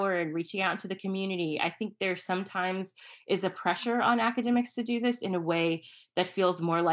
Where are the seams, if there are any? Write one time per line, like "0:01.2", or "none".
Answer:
none